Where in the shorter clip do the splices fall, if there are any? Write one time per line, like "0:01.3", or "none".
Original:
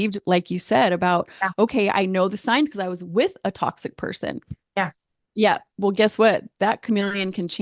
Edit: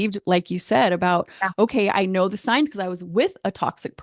none